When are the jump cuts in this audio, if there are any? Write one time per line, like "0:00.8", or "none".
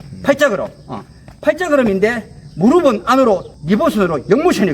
0:03.5